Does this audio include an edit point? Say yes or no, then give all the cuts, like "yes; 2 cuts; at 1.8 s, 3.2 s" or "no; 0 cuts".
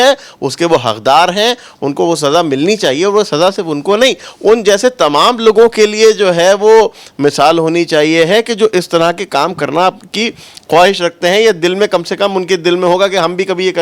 no; 0 cuts